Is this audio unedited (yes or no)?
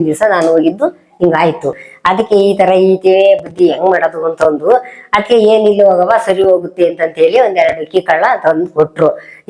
yes